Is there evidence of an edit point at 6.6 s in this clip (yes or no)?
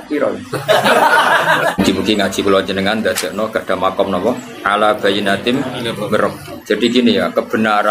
no